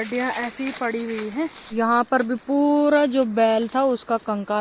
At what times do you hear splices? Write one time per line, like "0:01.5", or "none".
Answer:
0:01.6